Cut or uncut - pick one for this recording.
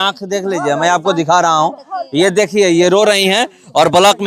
uncut